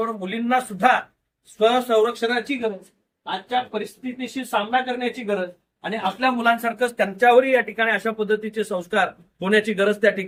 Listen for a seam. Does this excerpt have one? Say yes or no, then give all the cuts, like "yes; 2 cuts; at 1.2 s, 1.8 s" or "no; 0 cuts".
no; 0 cuts